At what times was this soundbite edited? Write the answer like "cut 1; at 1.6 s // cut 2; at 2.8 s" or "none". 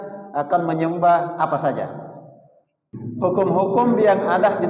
cut 1; at 2.9 s